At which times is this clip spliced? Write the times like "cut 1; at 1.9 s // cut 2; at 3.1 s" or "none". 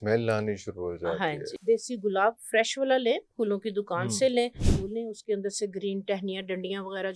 cut 1; at 1.5 s // cut 2; at 4.7 s